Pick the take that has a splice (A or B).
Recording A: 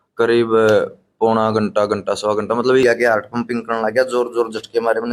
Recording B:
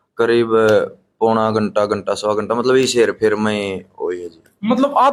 A